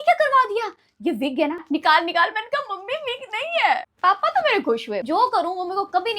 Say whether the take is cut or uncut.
cut